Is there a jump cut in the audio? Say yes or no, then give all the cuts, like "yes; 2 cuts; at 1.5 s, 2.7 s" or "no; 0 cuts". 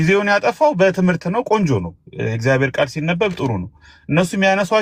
no; 0 cuts